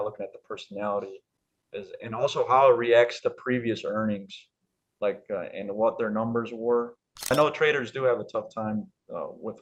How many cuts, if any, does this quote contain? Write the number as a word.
one